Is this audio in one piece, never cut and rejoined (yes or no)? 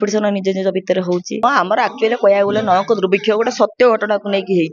no